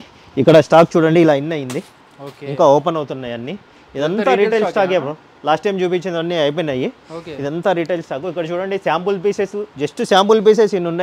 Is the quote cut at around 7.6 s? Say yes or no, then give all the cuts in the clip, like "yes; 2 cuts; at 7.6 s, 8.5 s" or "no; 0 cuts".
no; 0 cuts